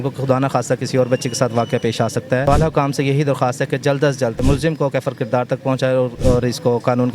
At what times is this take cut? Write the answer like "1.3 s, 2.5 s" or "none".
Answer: 2.4 s, 4.4 s, 6.1 s